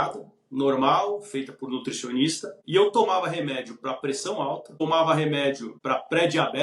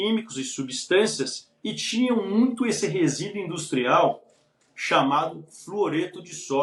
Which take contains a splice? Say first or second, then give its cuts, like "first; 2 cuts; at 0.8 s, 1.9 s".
first; 3 cuts; at 2.5 s, 4.8 s, 5.7 s